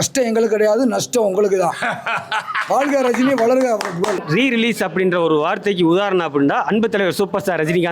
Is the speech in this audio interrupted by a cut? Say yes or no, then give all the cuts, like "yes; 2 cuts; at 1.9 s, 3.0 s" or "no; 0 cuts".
yes; 1 cut; at 4.2 s